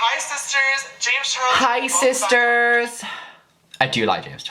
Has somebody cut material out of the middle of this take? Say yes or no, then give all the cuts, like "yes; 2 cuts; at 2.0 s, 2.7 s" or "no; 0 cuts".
no; 0 cuts